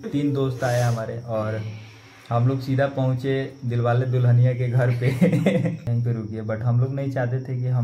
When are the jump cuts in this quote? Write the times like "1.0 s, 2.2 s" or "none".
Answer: 5.9 s